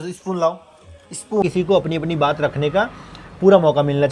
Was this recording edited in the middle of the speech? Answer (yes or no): yes